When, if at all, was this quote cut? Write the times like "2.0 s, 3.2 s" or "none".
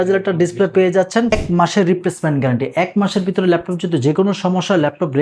1.3 s